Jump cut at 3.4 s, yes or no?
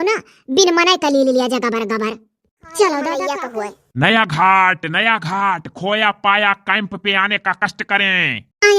yes